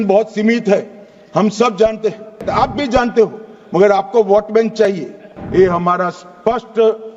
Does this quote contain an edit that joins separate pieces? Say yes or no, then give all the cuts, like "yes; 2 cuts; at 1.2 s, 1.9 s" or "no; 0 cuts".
yes; 2 cuts; at 2.4 s, 5.3 s